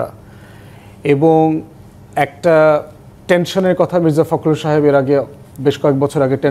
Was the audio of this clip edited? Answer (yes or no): no